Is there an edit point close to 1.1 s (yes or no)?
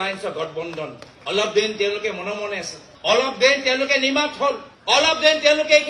yes